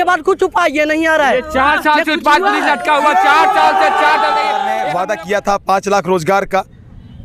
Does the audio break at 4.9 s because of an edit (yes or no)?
yes